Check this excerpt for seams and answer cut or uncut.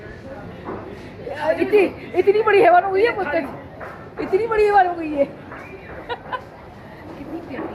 uncut